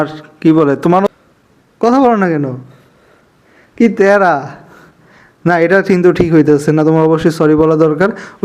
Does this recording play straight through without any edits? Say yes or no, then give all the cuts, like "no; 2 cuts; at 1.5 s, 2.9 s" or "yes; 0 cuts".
no; 1 cut; at 1.1 s